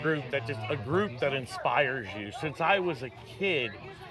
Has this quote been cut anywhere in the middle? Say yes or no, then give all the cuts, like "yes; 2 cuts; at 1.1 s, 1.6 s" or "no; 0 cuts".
no; 0 cuts